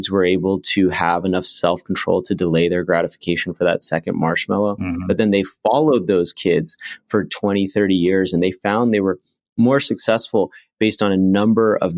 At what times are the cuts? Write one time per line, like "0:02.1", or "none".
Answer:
none